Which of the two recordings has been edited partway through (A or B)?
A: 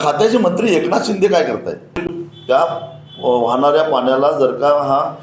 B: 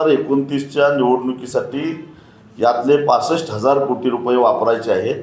A